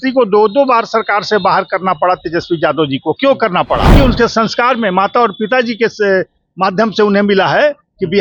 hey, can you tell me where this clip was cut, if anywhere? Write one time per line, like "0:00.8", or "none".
0:03.9